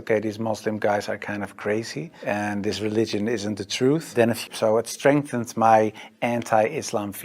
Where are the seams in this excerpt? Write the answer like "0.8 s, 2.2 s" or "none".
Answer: 4.4 s